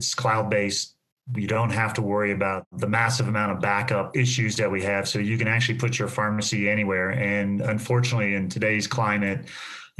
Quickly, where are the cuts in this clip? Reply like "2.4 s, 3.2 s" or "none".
2.7 s, 4.1 s